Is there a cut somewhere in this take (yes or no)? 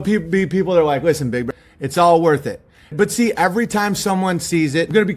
yes